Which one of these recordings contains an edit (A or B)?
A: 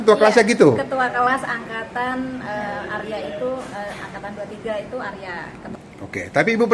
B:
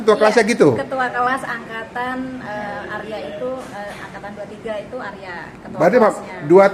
A